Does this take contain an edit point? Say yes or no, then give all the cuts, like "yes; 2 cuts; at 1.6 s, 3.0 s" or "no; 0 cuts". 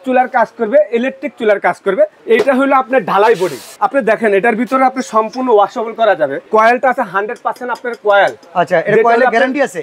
yes; 3 cuts; at 2.2 s, 3.7 s, 6.5 s